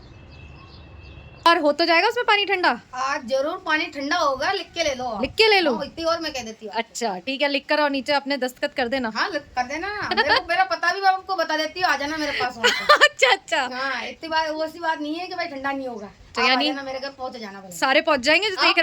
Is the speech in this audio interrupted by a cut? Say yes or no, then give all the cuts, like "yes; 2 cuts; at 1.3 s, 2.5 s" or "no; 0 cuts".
yes; 1 cut; at 1.2 s